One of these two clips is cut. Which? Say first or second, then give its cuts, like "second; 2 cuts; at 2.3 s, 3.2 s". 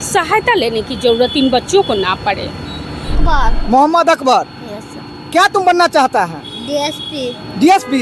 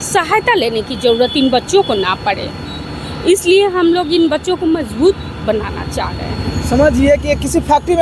first; 1 cut; at 3.2 s